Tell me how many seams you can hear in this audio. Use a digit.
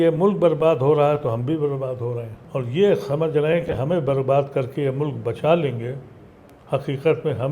1